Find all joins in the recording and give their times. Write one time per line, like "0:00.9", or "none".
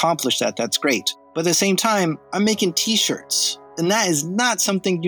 0:01.2
0:03.6